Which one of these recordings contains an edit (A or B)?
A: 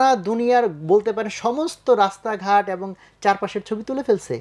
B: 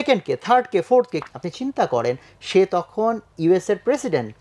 B